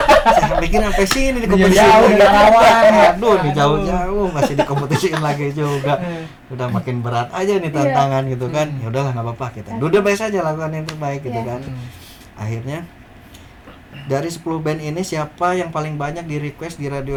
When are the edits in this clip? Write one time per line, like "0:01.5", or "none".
none